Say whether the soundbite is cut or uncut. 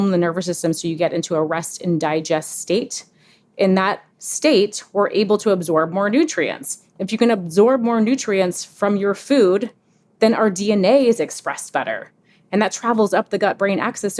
uncut